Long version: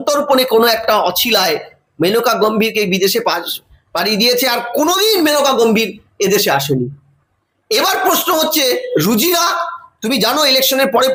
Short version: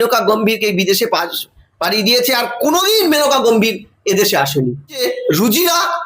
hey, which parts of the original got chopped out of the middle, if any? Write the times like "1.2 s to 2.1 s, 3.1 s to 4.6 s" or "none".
7.1 s to 8.6 s